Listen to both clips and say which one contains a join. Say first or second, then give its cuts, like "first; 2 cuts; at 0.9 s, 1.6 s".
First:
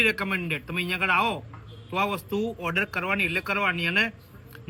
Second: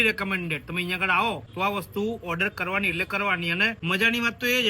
second; 2 cuts; at 1.5 s, 3.8 s